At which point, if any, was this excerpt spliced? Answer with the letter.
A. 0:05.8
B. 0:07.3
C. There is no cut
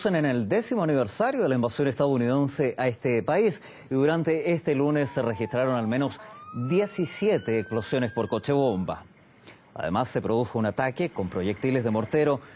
A